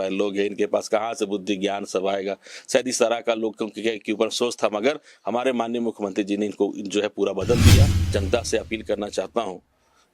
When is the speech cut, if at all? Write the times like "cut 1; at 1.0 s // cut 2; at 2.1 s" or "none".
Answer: cut 1; at 8.0 s